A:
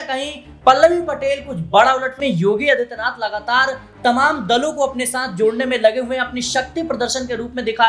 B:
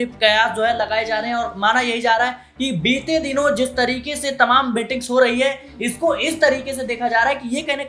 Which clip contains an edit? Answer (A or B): A